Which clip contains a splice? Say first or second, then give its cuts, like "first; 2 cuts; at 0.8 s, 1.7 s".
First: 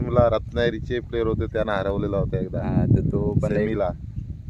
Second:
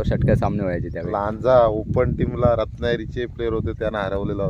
second; 1 cut; at 1.1 s